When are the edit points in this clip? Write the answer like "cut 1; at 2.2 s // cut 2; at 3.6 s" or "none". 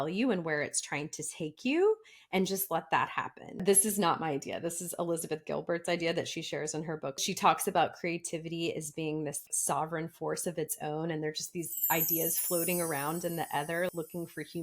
cut 1; at 3.6 s // cut 2; at 7.2 s // cut 3; at 9.4 s // cut 4; at 13.9 s